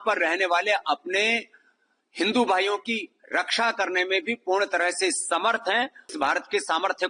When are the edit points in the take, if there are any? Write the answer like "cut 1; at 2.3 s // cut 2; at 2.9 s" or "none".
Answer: cut 1; at 6.1 s